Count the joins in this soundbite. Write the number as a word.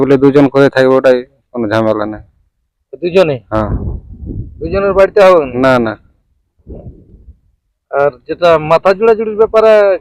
zero